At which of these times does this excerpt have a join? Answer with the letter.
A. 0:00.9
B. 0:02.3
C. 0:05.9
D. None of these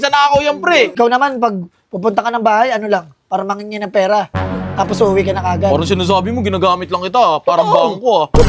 A